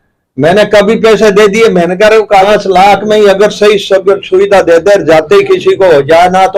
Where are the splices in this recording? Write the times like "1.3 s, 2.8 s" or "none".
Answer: 2.5 s